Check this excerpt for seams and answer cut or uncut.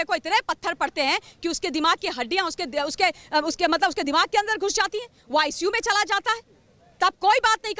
uncut